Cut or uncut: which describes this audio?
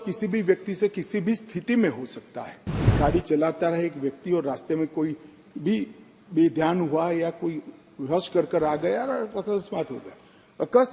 cut